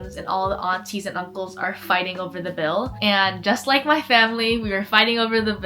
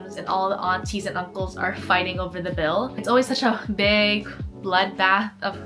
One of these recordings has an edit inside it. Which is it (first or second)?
first